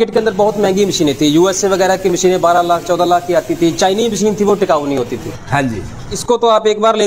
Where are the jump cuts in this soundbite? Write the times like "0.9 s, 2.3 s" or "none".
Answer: 6.1 s